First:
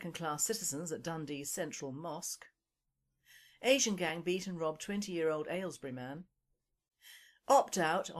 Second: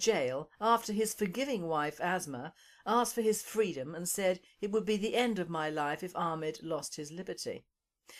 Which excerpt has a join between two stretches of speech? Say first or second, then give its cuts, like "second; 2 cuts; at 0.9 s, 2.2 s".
first; 1 cut; at 3.6 s